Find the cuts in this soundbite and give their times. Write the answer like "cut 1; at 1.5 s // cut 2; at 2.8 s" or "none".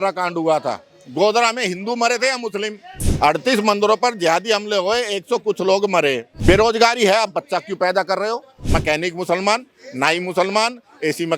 cut 1; at 3.0 s // cut 2; at 6.3 s // cut 3; at 8.6 s